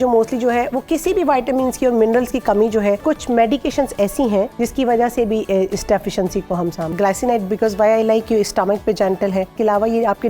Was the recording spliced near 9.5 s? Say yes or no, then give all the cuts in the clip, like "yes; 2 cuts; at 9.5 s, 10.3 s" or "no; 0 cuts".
yes; 4 cuts; at 3.0 s, 4.5 s, 6.9 s, 9.5 s